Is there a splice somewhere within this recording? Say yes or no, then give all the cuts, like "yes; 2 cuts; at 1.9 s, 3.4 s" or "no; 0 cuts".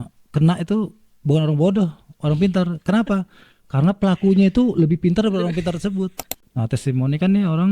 yes; 1 cut; at 6.3 s